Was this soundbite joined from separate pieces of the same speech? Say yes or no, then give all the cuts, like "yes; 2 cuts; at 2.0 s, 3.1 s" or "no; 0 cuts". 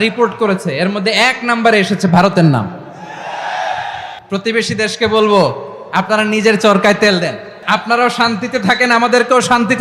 yes; 2 cuts; at 4.1 s, 7.5 s